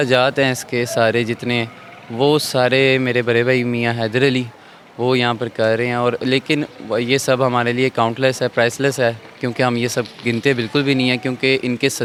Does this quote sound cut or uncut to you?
uncut